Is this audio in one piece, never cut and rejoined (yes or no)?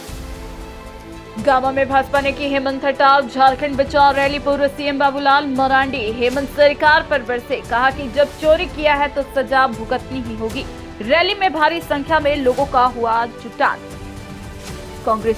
no